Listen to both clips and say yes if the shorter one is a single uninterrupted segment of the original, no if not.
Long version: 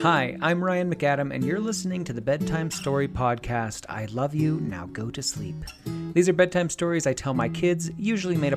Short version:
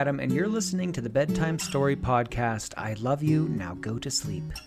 yes